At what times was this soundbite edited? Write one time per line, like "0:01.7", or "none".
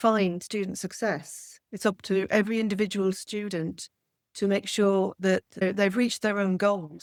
none